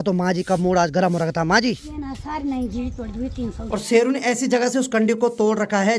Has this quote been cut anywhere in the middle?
yes; 2 cuts; at 1.9 s, 3.6 s

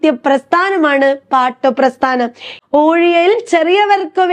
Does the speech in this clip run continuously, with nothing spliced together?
no; 1 cut; at 2.5 s

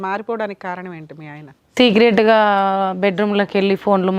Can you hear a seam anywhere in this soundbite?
no; 0 cuts

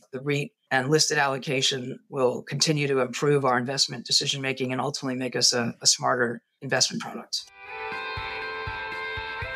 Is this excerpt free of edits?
no; 1 cut; at 7.6 s

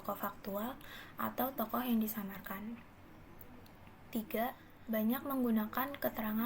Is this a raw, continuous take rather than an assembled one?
no; 1 cut; at 4.7 s

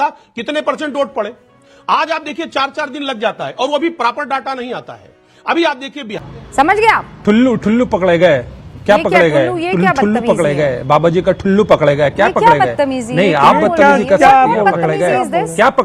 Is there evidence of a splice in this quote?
yes; 2 cuts; at 6.2 s, 13.2 s

